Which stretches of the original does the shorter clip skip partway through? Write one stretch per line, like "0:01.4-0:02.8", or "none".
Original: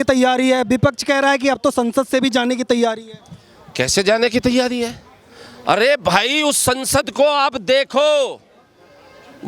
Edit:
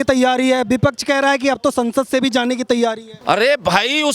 0:03.1-0:05.5